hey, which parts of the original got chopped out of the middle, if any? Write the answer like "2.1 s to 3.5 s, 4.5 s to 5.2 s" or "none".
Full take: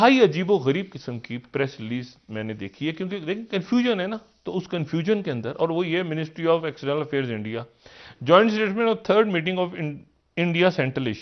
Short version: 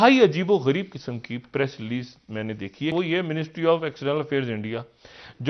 2.9 s to 5.7 s